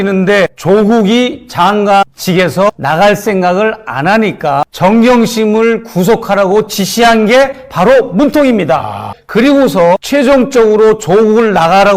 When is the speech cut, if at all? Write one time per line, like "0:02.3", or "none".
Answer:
0:04.7